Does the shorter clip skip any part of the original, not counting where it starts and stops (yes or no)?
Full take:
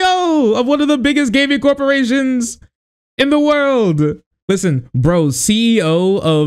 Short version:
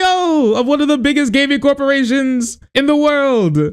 yes